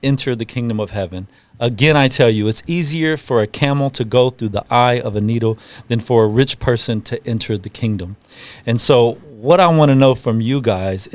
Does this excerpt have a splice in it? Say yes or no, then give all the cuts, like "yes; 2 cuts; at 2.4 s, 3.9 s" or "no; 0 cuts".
no; 0 cuts